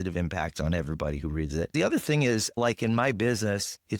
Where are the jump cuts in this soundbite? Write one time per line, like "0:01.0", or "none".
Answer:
0:01.7